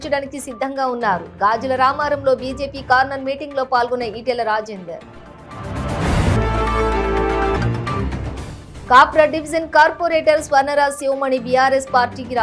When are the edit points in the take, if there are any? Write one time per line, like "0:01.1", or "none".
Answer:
none